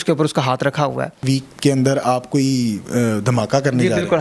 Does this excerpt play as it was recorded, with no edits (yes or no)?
no